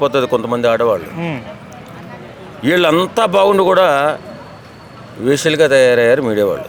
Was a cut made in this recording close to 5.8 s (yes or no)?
no